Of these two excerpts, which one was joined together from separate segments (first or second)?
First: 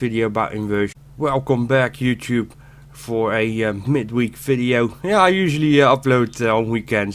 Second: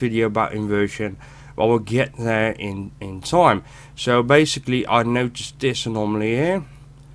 second